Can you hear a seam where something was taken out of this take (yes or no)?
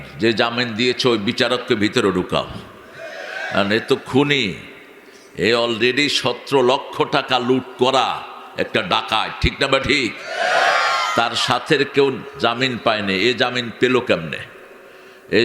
no